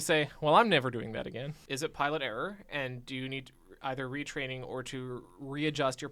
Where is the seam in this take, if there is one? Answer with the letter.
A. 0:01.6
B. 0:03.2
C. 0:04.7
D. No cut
A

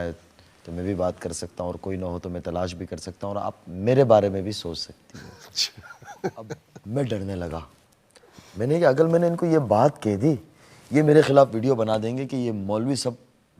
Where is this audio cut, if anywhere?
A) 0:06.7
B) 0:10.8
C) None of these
A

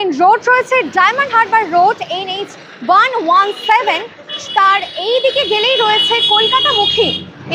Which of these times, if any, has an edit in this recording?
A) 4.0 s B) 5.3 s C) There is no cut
C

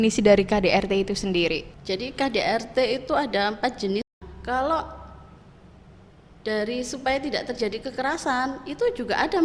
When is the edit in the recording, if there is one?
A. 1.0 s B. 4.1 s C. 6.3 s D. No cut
B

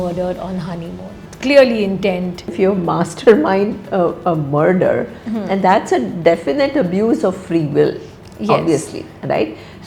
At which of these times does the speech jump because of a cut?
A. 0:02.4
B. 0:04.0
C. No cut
A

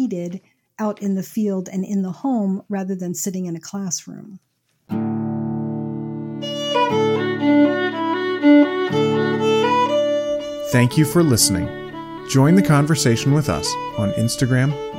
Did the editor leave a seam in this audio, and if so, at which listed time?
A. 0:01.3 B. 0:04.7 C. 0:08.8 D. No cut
B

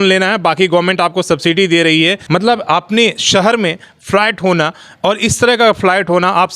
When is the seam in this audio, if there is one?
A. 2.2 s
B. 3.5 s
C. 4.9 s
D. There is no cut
A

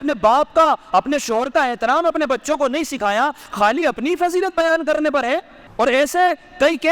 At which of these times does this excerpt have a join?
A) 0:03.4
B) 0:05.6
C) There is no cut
B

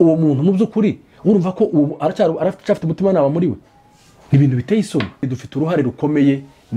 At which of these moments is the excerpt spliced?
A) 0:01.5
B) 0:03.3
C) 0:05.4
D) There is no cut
C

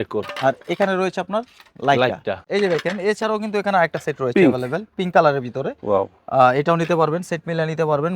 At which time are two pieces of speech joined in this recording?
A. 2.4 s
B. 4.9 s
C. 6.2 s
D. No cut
A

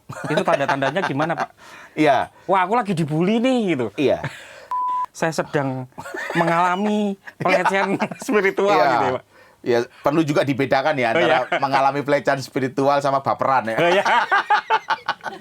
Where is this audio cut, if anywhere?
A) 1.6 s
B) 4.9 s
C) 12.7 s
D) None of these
B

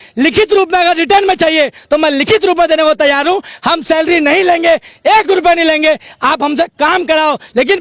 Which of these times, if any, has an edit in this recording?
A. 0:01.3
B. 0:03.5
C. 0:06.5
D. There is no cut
D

